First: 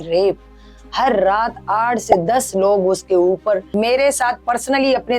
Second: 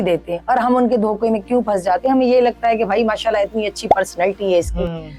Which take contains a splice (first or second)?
first